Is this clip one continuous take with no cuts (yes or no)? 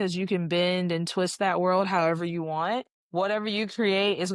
no